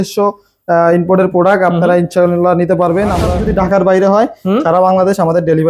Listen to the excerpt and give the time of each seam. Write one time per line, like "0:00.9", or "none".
0:03.2